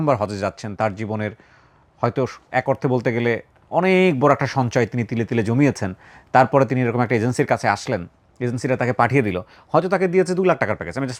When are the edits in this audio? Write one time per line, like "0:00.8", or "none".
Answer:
none